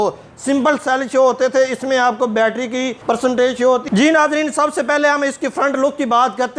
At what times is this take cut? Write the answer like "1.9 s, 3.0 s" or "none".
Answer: 3.9 s